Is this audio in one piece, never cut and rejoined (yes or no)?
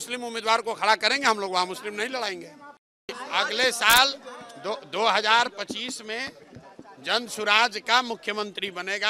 no